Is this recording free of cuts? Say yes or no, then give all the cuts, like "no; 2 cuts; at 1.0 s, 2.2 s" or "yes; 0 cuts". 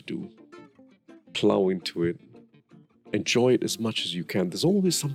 yes; 0 cuts